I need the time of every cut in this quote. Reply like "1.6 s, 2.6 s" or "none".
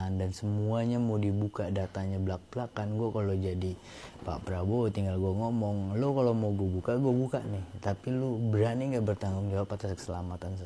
none